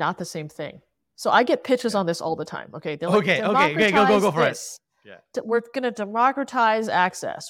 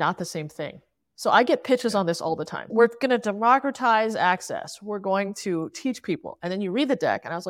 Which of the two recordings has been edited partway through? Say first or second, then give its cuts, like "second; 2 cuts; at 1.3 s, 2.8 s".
second; 1 cut; at 2.6 s